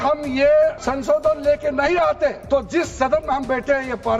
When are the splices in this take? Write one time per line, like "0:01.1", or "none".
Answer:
0:00.9
0:02.4